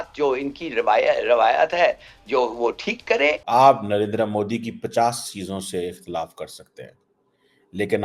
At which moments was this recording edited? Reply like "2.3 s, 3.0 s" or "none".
3.4 s